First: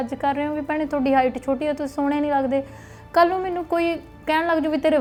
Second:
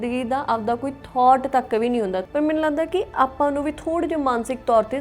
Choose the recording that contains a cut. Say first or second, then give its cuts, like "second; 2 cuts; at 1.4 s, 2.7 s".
second; 1 cut; at 2.3 s